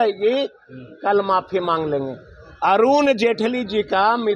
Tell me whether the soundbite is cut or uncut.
uncut